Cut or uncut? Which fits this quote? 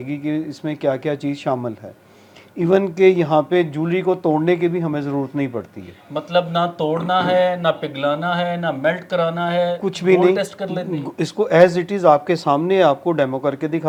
uncut